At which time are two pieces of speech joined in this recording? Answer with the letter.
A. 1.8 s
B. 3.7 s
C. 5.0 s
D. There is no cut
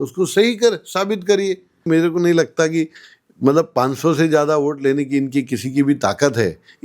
A